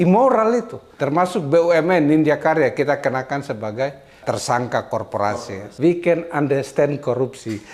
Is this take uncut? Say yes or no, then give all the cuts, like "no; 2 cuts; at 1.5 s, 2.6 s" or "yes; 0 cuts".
no; 2 cuts; at 0.9 s, 5.3 s